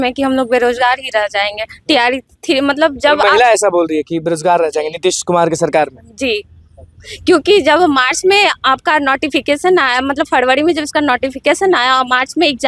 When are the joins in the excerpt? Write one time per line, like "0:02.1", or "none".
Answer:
none

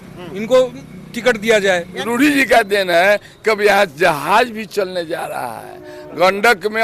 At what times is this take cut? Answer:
0:02.0

